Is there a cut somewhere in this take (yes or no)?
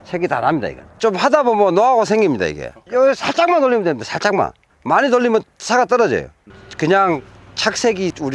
yes